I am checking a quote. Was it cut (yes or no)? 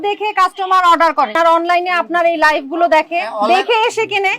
yes